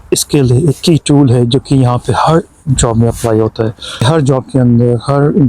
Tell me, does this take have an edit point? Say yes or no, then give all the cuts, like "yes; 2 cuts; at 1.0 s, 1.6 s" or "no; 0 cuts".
yes; 1 cut; at 4.0 s